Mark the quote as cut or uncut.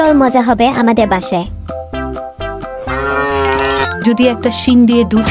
cut